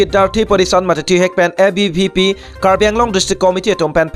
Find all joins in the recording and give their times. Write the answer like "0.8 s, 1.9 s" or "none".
none